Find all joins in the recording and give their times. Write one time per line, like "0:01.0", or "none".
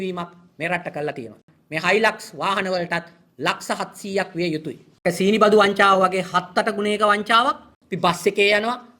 0:01.5
0:04.9
0:07.4